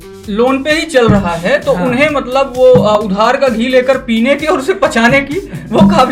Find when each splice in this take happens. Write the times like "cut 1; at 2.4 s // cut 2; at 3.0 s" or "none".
none